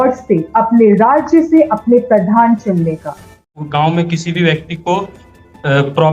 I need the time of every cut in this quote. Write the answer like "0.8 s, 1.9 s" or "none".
3.5 s